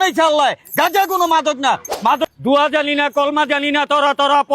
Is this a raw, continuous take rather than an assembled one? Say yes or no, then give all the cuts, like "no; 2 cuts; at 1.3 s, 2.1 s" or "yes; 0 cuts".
no; 1 cut; at 2.2 s